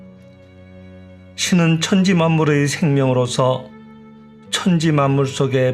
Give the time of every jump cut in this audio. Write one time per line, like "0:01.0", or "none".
0:00.9